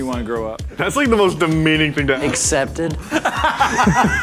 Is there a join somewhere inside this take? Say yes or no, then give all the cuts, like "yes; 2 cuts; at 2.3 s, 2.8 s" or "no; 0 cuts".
no; 0 cuts